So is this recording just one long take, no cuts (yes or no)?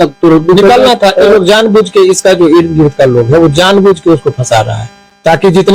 yes